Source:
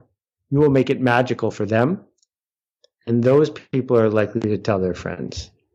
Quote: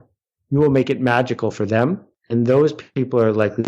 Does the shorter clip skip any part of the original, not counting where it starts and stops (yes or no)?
yes